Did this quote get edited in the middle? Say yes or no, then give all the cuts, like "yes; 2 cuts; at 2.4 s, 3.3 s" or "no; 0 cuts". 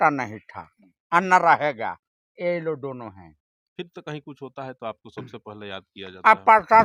no; 0 cuts